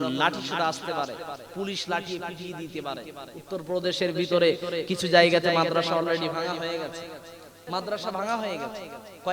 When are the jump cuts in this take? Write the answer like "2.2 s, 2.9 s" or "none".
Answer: 7.6 s